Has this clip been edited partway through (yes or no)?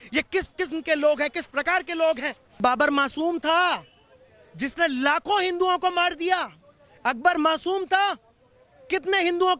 yes